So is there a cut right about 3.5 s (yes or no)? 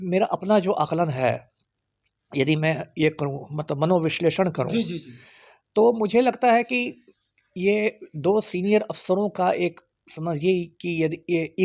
no